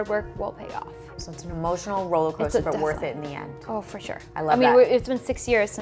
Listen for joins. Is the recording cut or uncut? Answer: uncut